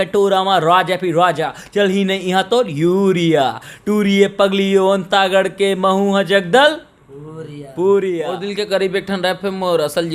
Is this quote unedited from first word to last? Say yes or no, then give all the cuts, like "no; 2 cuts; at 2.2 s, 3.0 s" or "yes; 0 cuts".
no; 1 cut; at 8.4 s